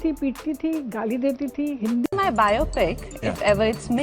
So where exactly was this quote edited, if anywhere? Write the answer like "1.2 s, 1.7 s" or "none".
2.0 s